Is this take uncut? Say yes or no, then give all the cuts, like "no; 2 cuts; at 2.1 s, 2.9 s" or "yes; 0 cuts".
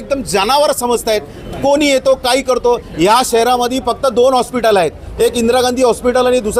yes; 0 cuts